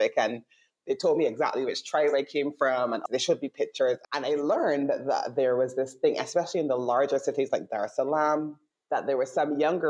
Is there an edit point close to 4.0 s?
yes; 2 cuts; at 3.0 s, 4.0 s

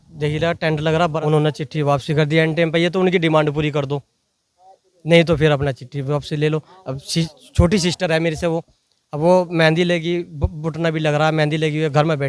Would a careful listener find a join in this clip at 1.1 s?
yes; 1 cut; at 1.1 s

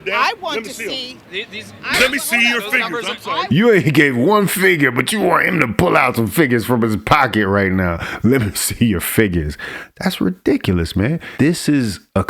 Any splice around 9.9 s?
no; 1 cut; at 11.2 s

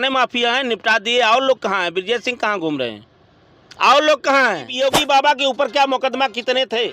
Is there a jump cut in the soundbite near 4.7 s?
yes; 1 cut; at 4.7 s

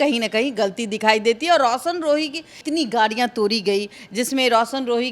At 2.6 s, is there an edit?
yes; 1 cut; at 2.6 s

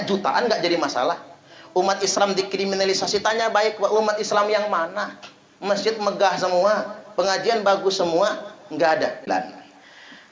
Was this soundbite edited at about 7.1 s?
no; 1 cut; at 9.2 s

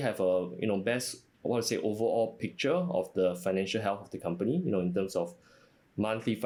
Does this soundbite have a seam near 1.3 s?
no; 0 cuts

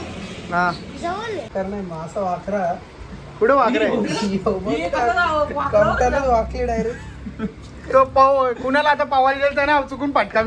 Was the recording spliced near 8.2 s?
no; 1 cut; at 1.5 s

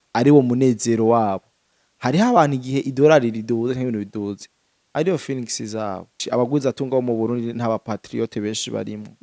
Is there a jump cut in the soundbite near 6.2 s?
yes; 1 cut; at 6.2 s

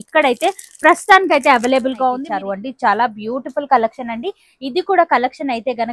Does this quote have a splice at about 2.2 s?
yes; 1 cut; at 2.2 s

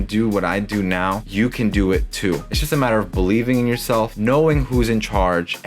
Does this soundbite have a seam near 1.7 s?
no; 0 cuts

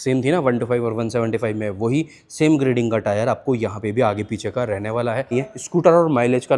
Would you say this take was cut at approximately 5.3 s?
yes; 1 cut; at 5.3 s

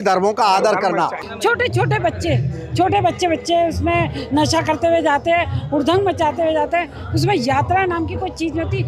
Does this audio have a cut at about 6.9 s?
no; 1 cut; at 1.2 s

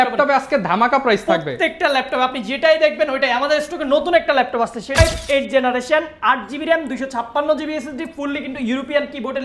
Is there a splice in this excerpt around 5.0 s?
yes; 1 cut; at 5.0 s

